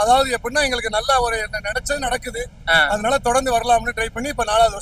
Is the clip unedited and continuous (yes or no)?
yes